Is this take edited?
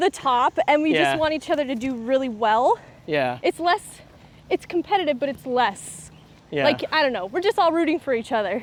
no; 0 cuts

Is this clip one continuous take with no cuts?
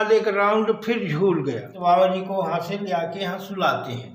no; 1 cut; at 1.7 s

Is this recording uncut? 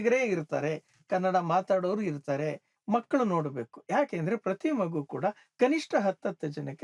no; 1 cut; at 2.7 s

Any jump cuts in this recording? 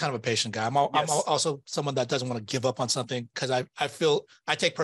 no; 0 cuts

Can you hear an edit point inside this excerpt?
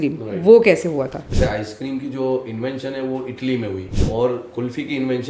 yes; 2 cuts; at 1.3 s, 3.9 s

